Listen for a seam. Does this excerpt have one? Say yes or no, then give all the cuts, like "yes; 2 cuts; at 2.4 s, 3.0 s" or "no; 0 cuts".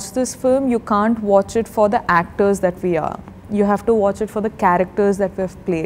no; 0 cuts